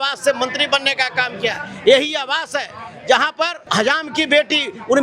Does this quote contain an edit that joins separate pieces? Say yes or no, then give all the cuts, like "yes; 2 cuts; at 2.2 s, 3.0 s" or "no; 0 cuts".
yes; 1 cut; at 3.7 s